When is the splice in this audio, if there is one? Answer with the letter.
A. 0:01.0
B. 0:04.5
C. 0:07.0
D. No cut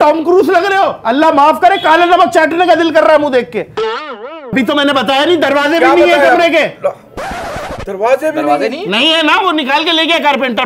B